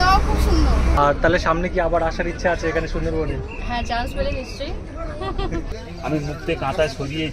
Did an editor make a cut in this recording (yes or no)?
yes